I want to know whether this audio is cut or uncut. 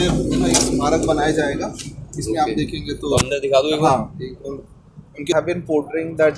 cut